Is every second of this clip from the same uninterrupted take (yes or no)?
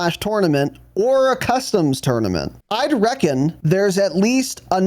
no